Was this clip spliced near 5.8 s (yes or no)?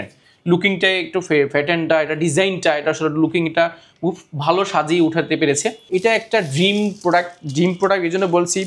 yes